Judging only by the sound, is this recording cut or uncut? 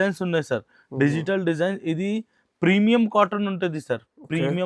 uncut